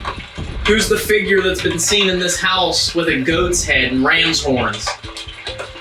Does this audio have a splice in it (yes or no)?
no